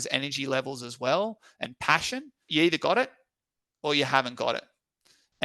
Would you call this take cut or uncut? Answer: cut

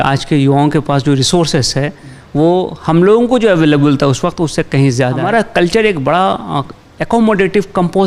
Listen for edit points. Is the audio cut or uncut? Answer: cut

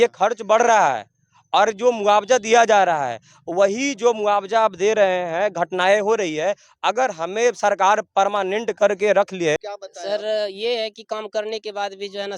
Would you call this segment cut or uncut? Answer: cut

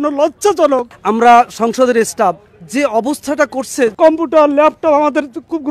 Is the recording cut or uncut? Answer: cut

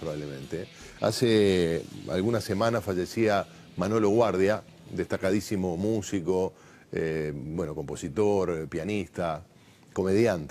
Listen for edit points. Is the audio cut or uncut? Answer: cut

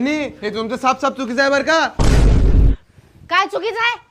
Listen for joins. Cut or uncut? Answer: uncut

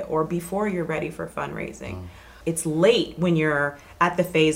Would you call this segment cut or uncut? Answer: cut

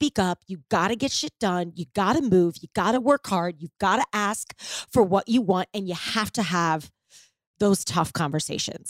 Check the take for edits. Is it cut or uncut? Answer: uncut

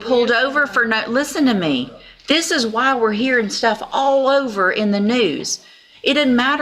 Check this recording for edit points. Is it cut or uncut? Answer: uncut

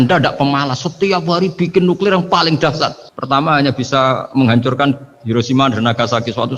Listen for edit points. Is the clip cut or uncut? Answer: uncut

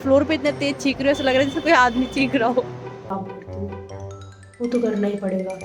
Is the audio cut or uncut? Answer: cut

